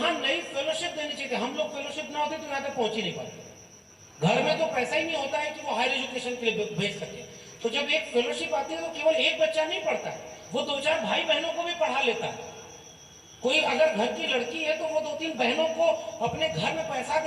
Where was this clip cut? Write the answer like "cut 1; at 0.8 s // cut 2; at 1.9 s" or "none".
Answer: none

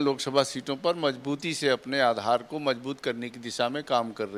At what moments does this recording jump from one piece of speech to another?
none

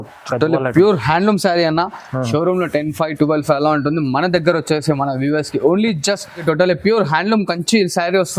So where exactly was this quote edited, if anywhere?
cut 1; at 6.4 s

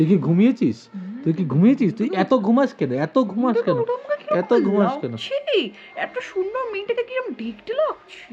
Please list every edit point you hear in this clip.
none

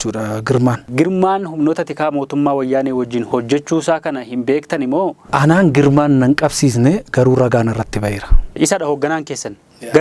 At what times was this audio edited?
cut 1; at 0.9 s // cut 2; at 5.3 s // cut 3; at 8.5 s

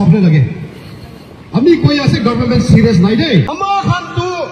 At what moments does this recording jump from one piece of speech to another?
cut 1; at 3.5 s

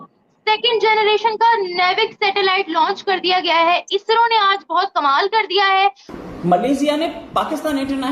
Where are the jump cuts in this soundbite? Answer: cut 1; at 6.1 s

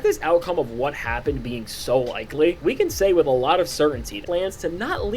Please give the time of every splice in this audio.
cut 1; at 4.2 s

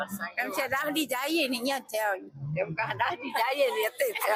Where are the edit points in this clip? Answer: none

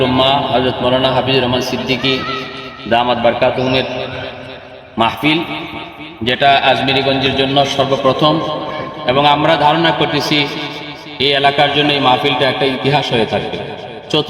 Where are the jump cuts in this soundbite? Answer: none

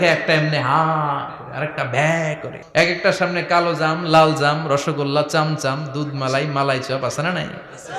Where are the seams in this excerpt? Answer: cut 1; at 2.5 s

